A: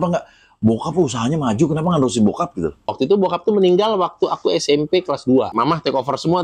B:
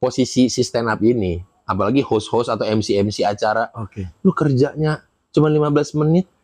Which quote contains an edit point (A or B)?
A